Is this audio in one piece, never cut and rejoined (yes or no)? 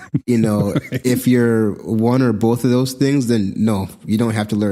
no